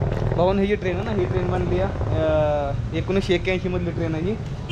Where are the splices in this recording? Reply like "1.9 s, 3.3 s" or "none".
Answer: none